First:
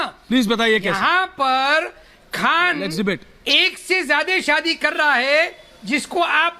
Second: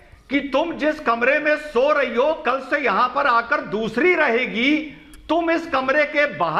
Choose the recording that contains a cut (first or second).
first